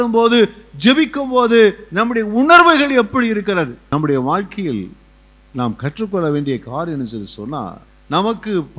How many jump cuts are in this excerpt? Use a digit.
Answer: 2